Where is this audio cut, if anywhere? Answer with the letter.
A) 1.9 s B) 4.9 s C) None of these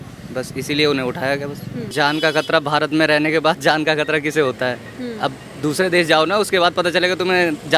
A